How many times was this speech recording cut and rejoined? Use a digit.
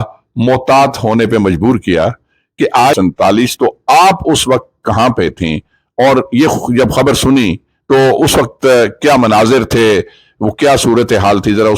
1